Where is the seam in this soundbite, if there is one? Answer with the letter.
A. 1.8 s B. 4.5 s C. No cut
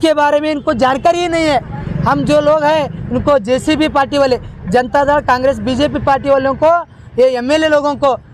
C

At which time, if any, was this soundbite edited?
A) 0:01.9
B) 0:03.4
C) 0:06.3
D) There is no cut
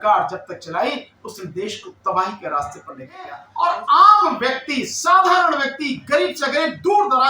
B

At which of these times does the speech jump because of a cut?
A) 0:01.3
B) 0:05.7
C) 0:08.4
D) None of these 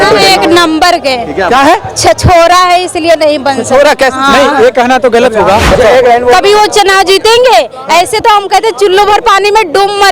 B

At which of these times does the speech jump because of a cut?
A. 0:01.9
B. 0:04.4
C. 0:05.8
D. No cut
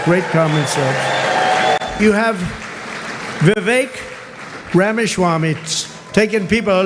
A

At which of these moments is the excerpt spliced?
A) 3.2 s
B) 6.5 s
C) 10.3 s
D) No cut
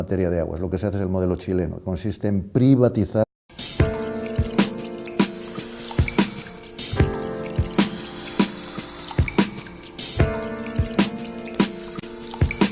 D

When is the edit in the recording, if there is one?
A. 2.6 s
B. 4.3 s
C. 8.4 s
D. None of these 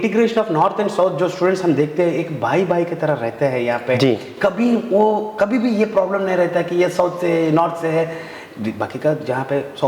D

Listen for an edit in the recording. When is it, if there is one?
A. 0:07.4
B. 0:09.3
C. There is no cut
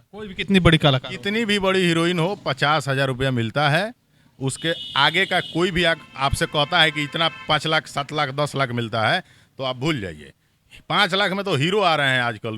C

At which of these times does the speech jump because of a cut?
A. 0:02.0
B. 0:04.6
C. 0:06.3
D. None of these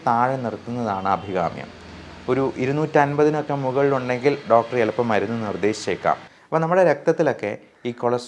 C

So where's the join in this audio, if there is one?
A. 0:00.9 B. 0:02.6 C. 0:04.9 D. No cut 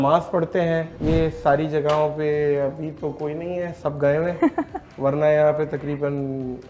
A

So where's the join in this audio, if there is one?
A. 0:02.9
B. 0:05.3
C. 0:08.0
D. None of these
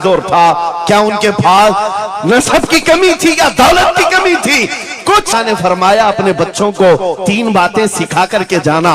B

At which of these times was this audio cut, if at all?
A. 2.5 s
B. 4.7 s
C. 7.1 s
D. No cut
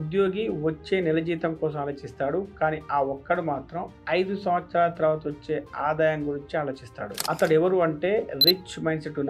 D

